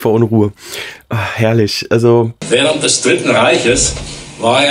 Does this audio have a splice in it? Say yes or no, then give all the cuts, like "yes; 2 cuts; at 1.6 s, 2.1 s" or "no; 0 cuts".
yes; 1 cut; at 2.4 s